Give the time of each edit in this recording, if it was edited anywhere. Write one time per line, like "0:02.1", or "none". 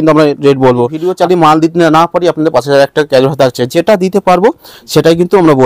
0:01.0